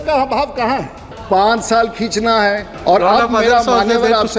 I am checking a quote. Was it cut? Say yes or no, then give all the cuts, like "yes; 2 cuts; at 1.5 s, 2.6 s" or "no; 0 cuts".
yes; 2 cuts; at 1.1 s, 2.7 s